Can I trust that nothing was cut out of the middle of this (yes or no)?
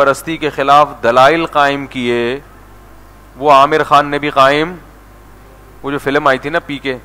yes